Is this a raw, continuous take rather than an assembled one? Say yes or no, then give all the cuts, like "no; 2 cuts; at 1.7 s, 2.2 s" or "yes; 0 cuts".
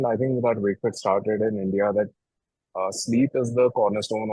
yes; 0 cuts